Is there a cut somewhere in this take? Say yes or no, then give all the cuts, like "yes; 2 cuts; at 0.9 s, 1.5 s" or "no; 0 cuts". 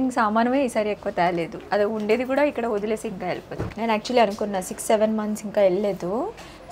yes; 1 cut; at 3.6 s